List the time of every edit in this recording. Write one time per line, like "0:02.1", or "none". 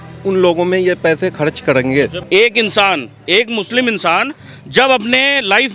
0:02.2